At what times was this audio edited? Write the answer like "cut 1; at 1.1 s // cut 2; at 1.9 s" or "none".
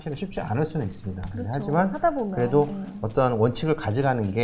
none